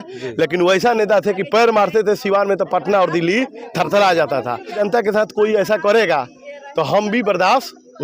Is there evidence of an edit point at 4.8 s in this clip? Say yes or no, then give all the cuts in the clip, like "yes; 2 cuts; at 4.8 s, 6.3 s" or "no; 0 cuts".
yes; 1 cut; at 4.8 s